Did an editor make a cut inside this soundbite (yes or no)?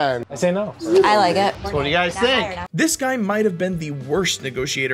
no